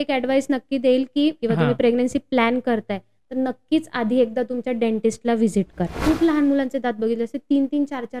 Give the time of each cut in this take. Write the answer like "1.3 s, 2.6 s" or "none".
1.4 s, 6.0 s